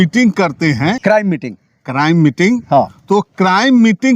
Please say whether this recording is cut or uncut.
cut